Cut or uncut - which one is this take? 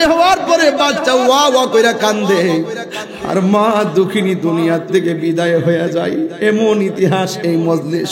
uncut